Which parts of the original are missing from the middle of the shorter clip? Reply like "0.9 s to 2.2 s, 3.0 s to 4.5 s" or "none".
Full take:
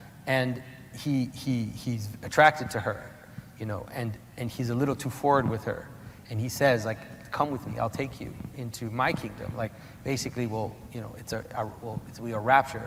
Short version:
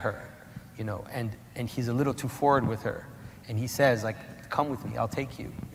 none